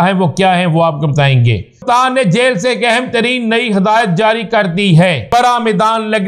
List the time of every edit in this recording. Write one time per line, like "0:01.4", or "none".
0:01.8
0:05.2